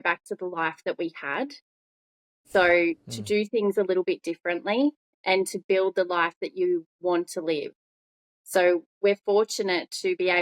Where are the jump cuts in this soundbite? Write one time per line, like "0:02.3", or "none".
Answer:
none